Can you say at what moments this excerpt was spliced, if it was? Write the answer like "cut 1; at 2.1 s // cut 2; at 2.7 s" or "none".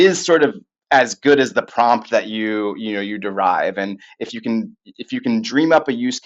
none